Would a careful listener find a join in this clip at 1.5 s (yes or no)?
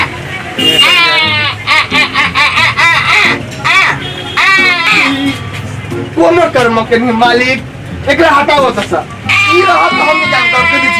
no